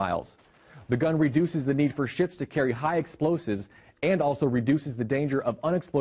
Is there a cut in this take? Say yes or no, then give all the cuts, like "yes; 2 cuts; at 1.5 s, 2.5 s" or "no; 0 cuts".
yes; 1 cut; at 2.1 s